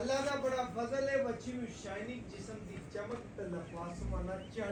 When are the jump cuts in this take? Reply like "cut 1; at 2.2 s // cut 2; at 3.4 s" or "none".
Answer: none